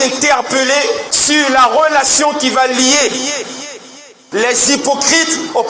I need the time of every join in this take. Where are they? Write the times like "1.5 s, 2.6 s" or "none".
1.0 s